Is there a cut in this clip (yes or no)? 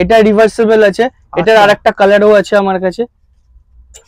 no